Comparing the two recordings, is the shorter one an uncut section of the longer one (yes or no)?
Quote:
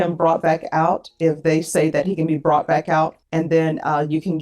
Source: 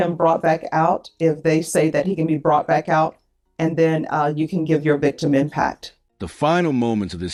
no